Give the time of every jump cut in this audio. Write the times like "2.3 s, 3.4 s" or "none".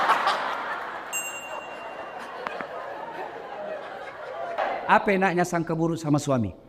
4.6 s